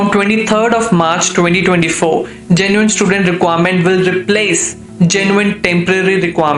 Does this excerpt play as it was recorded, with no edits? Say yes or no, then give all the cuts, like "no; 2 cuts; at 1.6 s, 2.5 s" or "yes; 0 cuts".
yes; 0 cuts